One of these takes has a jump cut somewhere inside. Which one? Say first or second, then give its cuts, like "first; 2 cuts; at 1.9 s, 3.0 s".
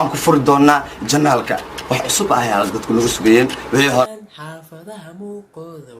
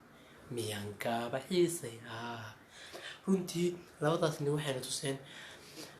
first; 1 cut; at 4.1 s